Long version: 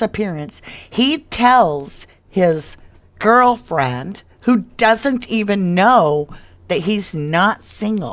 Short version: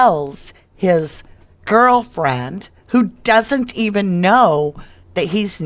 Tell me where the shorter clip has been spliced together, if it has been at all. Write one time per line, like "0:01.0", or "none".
none